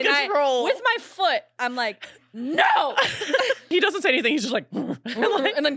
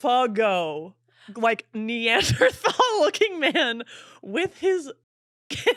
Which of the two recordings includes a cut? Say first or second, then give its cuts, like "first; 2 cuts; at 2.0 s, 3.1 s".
first; 1 cut; at 3.7 s